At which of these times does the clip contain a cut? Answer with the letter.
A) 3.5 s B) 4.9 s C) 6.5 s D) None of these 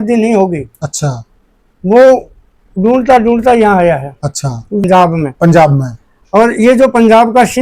B